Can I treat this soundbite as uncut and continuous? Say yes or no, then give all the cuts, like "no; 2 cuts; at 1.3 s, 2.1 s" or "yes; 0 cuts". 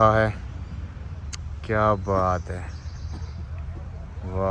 yes; 0 cuts